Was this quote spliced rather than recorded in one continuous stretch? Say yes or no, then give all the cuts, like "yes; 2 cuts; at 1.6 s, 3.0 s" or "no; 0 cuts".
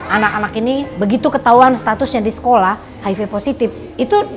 yes; 1 cut; at 0.9 s